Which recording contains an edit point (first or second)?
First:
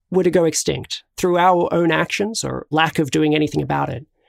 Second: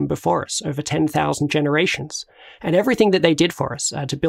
first